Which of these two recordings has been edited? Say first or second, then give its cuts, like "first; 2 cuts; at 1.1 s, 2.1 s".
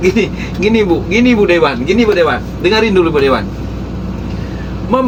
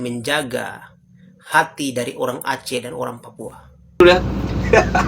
second; 1 cut; at 4.0 s